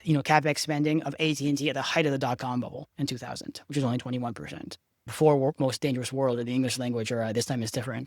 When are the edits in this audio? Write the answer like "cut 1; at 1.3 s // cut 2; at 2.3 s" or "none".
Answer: cut 1; at 5.1 s